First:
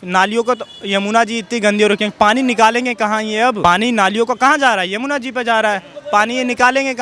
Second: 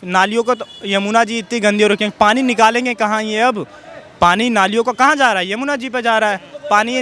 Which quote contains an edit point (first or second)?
first